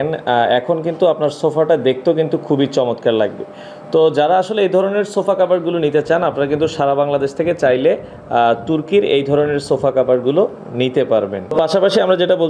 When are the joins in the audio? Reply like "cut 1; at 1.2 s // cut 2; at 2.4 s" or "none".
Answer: none